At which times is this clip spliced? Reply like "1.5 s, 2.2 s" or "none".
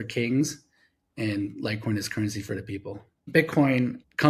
3.3 s